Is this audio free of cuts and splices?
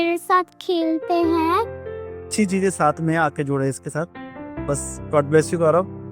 no; 1 cut; at 2.3 s

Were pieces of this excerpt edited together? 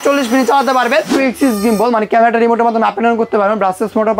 yes; 1 cut; at 1.1 s

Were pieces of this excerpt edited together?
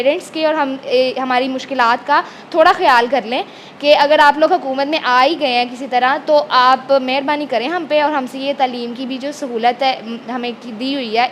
no; 0 cuts

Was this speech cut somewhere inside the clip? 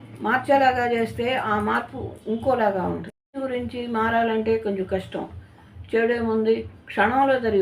yes; 1 cut; at 3.4 s

